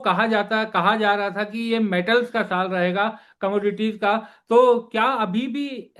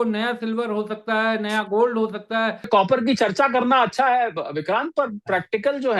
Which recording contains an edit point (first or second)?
second